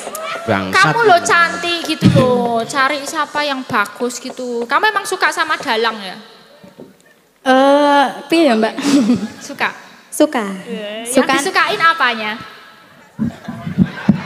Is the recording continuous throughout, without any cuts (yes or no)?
yes